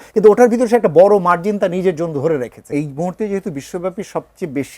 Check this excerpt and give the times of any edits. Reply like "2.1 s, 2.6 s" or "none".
2.7 s